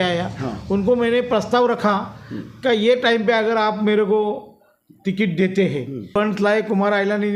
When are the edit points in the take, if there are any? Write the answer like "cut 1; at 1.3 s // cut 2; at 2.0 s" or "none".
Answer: cut 1; at 6.1 s